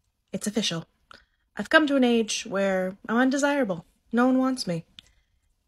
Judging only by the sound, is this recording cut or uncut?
uncut